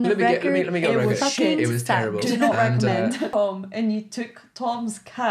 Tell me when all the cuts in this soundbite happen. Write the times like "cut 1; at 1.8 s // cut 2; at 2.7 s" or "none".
cut 1; at 3.3 s